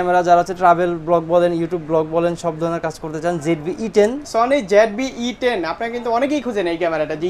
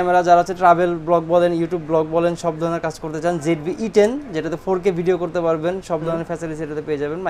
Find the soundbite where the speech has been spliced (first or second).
first